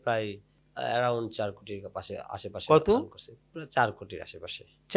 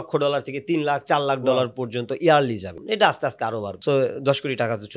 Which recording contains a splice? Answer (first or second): second